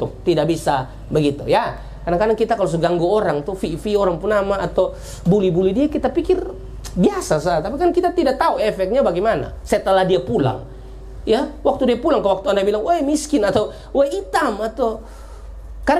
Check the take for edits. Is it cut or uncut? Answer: uncut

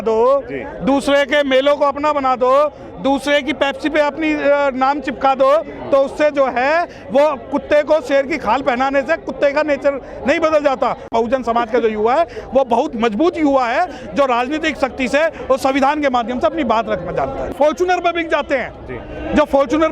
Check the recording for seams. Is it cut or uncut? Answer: cut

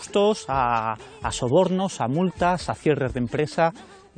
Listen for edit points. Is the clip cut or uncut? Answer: uncut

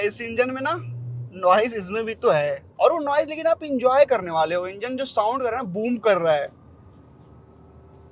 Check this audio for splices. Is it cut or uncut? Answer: uncut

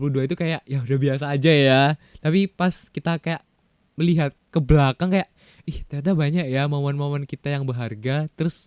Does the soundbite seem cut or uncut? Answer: uncut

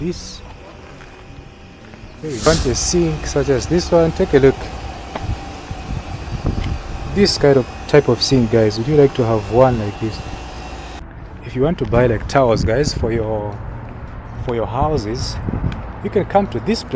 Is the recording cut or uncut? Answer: cut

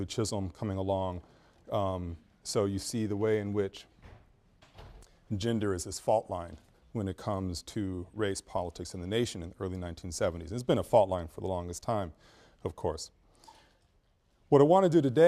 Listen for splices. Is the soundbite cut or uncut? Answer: uncut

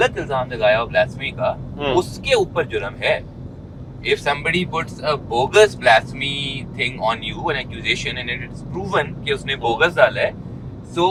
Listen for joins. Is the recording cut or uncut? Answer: uncut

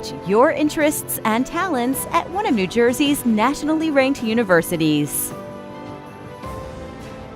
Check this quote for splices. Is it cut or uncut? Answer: cut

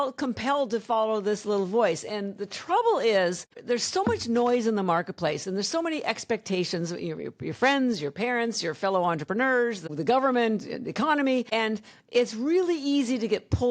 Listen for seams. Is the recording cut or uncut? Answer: cut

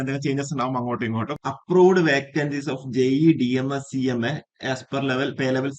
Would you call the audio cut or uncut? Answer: cut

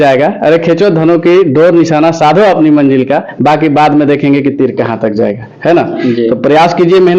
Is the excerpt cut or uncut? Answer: uncut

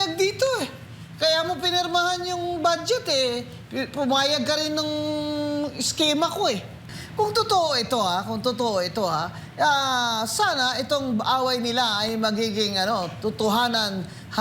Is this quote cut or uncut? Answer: cut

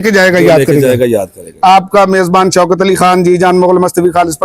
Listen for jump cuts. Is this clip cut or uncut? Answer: cut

